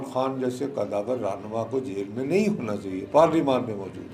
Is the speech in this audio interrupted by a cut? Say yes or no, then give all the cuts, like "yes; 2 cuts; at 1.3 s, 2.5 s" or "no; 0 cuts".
no; 0 cuts